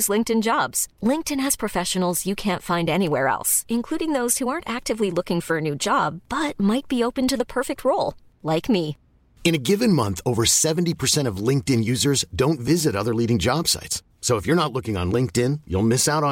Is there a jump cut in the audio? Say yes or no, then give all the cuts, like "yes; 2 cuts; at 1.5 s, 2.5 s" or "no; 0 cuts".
no; 0 cuts